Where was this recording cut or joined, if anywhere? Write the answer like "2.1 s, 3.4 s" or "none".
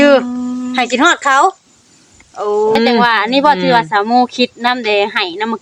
2.8 s